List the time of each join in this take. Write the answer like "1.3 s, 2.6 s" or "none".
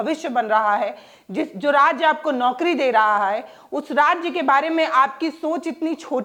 none